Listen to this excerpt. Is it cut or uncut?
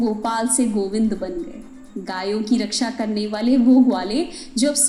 uncut